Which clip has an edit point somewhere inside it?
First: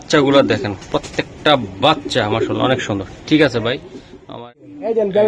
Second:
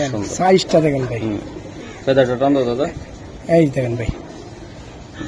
first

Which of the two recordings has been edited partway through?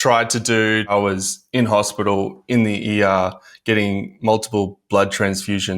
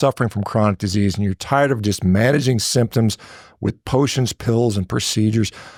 first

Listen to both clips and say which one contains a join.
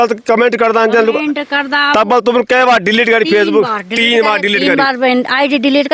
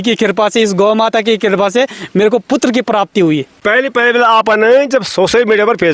second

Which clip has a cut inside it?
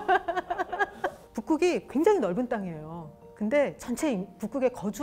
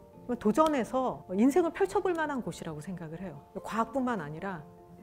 second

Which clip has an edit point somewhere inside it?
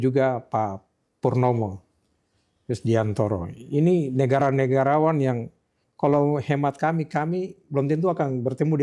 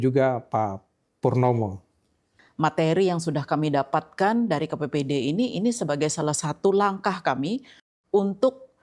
second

